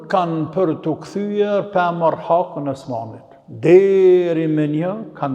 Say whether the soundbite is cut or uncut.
uncut